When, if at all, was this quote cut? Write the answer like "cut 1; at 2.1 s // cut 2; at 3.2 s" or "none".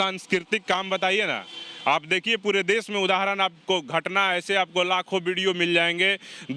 none